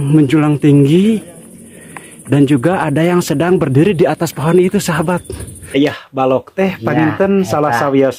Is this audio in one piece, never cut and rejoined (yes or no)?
no